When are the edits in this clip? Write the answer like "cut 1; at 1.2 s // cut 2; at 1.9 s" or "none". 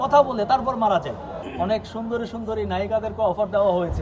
cut 1; at 1.4 s